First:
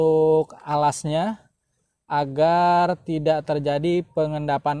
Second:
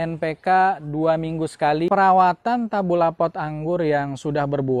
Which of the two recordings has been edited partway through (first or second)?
second